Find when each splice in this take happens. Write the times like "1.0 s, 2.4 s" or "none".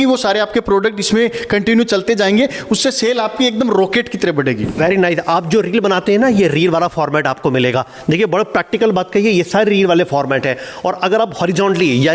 none